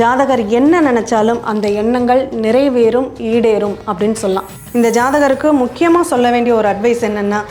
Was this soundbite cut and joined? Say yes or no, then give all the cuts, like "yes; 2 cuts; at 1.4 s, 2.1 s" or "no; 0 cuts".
yes; 1 cut; at 4.7 s